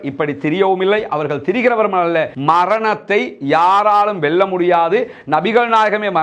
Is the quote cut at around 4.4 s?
no; 1 cut; at 2.3 s

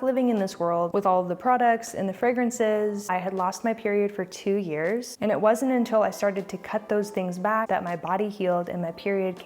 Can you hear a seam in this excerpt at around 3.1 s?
yes; 4 cuts; at 0.9 s, 3.1 s, 5.1 s, 7.7 s

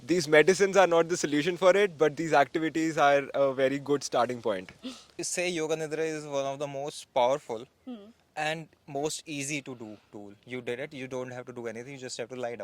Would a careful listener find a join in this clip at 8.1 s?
no; 1 cut; at 5.3 s

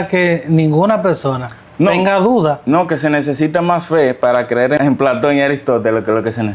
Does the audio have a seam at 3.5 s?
no; 1 cut; at 4.8 s

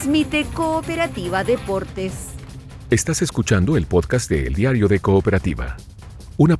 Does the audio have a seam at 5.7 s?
no; 1 cut; at 2.6 s

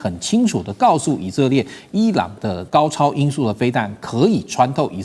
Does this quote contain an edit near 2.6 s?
yes; 1 cut; at 2.6 s

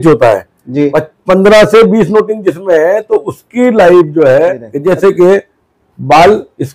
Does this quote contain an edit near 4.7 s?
yes; 1 cut; at 4.7 s

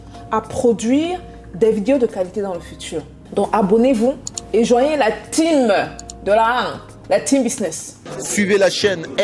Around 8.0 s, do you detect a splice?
yes; 1 cut; at 8.0 s

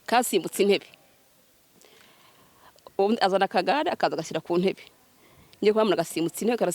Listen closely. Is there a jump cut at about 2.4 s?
no; 0 cuts

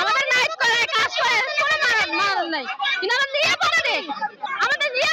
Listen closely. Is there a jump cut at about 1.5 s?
no; 0 cuts

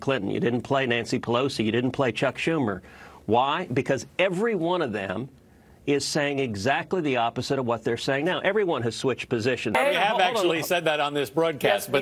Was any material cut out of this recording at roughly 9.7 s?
yes; 1 cut; at 9.7 s

